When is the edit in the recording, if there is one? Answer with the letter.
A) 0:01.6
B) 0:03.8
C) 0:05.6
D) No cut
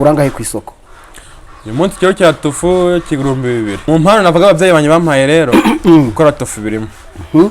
B